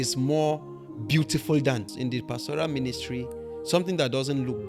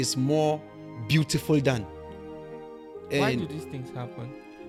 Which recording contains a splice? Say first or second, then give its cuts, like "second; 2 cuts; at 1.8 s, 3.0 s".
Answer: first; 1 cut; at 1.9 s